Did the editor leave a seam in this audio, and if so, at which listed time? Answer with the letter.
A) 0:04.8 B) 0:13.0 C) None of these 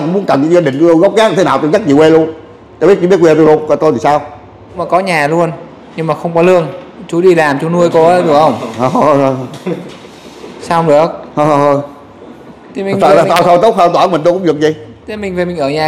A